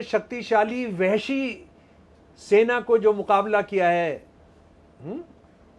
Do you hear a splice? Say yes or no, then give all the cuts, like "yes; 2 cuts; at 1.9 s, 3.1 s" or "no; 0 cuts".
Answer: no; 0 cuts